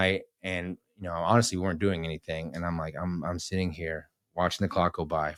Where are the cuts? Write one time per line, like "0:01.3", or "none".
none